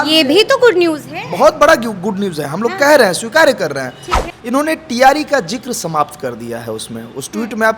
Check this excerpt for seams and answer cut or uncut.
cut